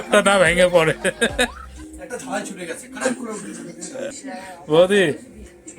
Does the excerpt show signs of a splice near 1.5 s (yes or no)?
no